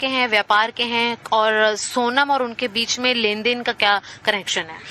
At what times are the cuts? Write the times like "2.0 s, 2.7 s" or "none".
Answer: 2.5 s